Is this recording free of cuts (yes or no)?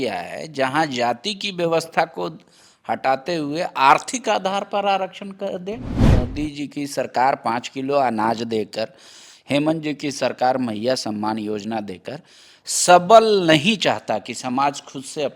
no